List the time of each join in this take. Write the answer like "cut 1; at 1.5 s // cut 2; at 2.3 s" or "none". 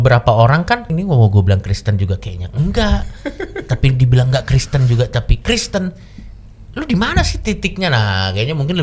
cut 1; at 0.9 s